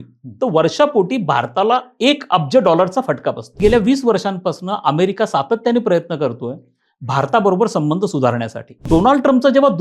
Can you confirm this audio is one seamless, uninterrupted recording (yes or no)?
no